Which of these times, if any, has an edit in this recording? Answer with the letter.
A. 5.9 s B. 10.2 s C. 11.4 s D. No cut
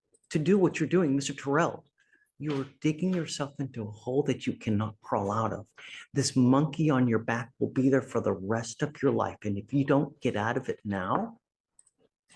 D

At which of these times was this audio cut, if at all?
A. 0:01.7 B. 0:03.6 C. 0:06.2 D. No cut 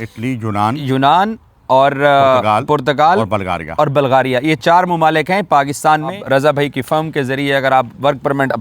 C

